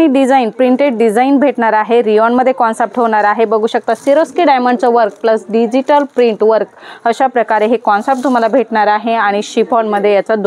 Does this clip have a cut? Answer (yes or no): no